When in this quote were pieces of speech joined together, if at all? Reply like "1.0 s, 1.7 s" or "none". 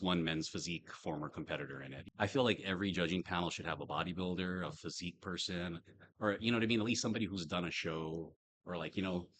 1.9 s